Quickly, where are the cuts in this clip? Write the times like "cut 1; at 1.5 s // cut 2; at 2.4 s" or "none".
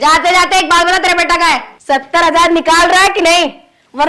cut 1; at 1.7 s